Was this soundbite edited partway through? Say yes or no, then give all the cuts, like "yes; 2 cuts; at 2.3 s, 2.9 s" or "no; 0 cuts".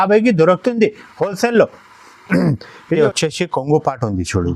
yes; 1 cut; at 3.0 s